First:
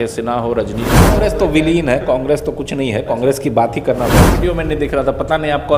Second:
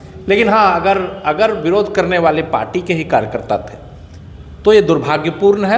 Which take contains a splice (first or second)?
first